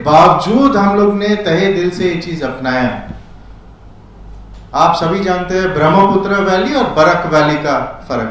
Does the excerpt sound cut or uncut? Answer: uncut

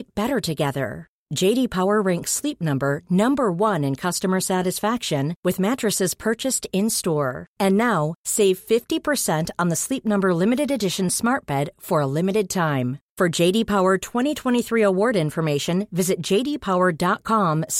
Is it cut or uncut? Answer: uncut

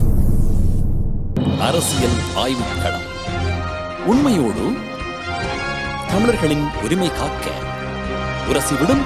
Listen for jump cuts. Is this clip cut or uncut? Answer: cut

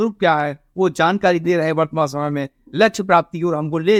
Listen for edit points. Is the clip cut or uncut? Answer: uncut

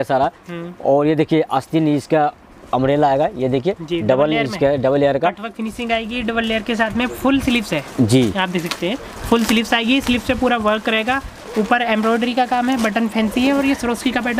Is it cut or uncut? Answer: uncut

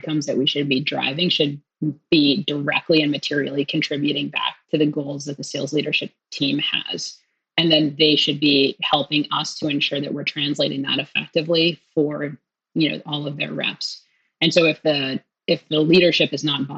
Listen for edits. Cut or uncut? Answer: uncut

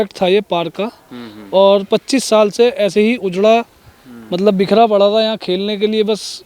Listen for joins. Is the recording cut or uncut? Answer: uncut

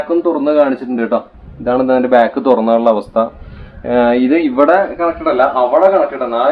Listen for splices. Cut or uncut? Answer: uncut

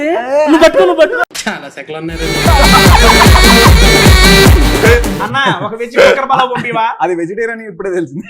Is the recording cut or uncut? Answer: cut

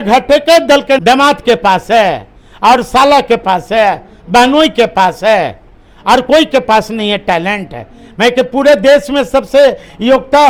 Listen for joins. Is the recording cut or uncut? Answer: uncut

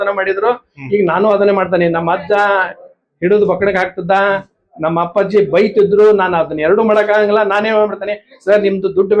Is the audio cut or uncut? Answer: uncut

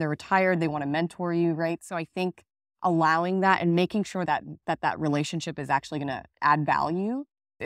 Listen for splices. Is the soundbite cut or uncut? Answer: uncut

